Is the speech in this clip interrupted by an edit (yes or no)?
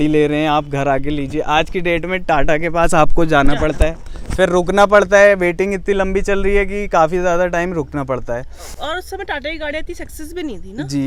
no